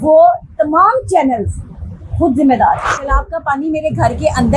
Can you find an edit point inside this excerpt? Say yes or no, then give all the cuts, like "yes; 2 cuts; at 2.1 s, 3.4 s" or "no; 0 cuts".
yes; 1 cut; at 2.9 s